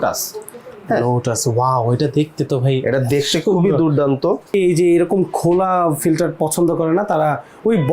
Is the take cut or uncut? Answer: cut